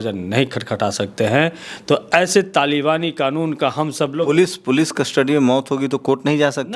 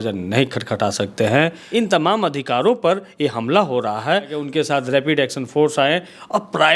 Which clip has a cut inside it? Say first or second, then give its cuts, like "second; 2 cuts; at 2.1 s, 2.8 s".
second; 2 cuts; at 1.6 s, 4.4 s